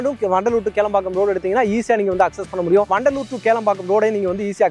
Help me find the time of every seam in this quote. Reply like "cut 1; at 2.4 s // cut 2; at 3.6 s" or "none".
cut 1; at 2.9 s